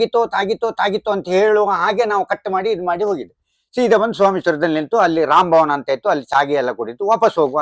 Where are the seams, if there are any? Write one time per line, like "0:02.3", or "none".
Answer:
none